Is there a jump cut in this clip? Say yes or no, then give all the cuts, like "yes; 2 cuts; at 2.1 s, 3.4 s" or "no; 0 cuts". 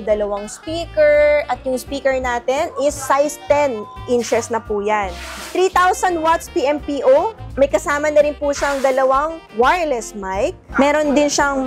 no; 0 cuts